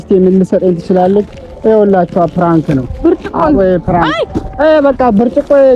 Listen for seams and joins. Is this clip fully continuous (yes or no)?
no